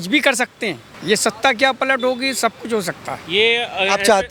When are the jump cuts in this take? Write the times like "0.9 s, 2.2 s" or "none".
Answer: none